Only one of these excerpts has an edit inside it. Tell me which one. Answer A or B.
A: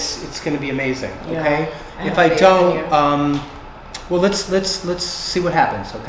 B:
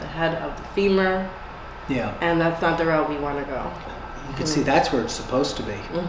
B